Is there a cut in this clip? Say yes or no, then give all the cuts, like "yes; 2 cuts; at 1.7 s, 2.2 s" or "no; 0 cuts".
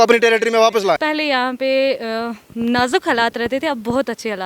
yes; 1 cut; at 1.0 s